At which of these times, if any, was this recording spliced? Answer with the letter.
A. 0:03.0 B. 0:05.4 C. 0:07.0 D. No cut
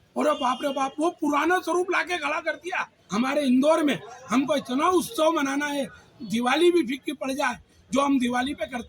A